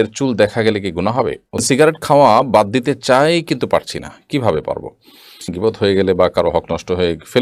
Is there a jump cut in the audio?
yes; 2 cuts; at 1.6 s, 5.5 s

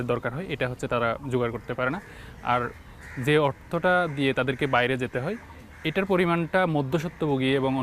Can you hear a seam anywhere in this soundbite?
no; 0 cuts

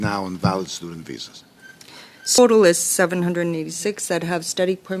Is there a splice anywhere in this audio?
yes; 1 cut; at 2.4 s

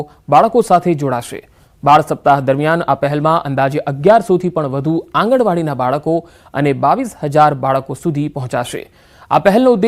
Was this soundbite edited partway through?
no; 0 cuts

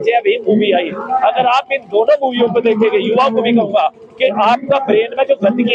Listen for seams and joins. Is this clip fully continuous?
yes; 0 cuts

